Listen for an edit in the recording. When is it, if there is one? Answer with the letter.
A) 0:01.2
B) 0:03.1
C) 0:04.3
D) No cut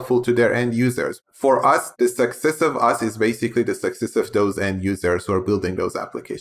A